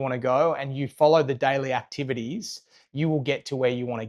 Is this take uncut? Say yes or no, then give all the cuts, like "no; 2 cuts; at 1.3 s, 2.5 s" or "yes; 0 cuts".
yes; 0 cuts